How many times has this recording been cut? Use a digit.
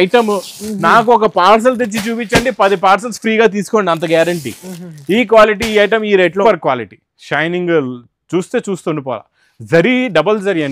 1